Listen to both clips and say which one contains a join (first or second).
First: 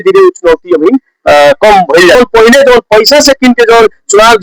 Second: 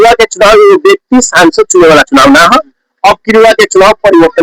first